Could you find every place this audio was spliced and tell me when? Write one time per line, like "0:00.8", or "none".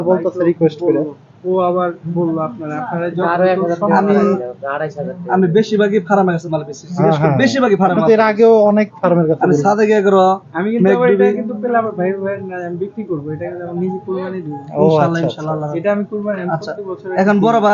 none